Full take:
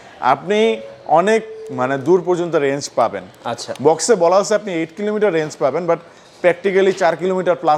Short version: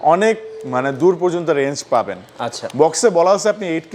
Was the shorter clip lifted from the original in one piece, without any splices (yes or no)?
yes